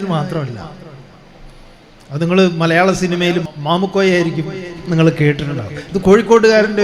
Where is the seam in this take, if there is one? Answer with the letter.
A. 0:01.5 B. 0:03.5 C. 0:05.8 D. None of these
B